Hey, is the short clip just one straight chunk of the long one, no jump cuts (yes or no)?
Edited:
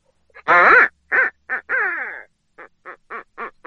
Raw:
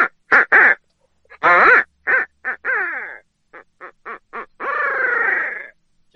yes